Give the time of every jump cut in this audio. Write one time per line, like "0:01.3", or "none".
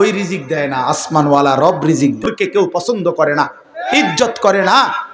0:02.8